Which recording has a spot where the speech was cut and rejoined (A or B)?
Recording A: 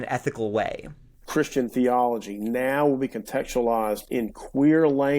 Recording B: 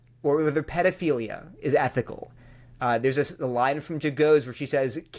A